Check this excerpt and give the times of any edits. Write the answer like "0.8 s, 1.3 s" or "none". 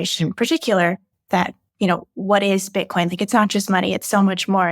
1.1 s